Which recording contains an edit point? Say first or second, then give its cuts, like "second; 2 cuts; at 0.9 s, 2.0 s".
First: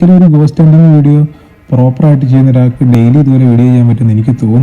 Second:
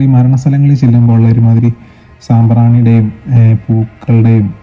first; 1 cut; at 3.0 s